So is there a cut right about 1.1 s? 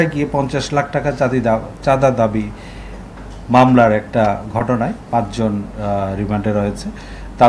no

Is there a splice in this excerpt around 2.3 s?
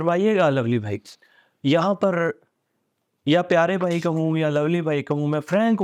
no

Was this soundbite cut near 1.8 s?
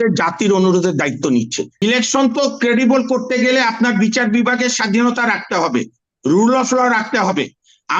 yes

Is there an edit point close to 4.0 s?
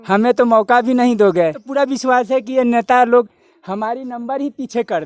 no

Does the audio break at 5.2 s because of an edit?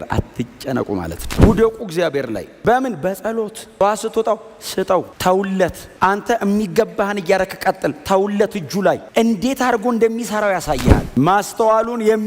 no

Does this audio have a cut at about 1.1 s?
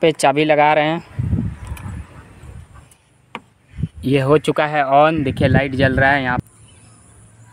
no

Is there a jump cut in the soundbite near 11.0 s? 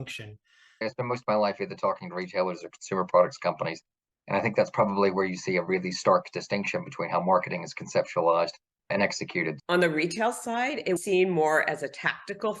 yes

